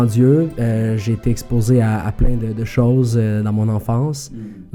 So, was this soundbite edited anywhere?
no; 0 cuts

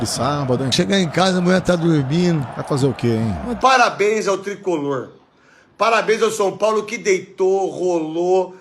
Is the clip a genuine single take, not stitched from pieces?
no; 1 cut; at 3.5 s

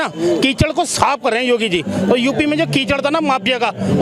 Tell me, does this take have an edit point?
no; 0 cuts

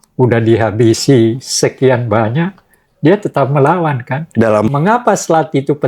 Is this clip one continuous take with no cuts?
no; 1 cut; at 4.7 s

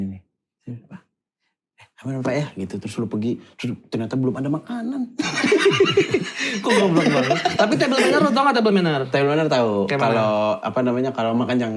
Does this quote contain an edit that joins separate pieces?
no; 0 cuts

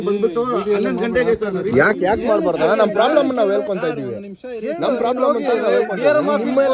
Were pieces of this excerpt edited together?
no; 0 cuts

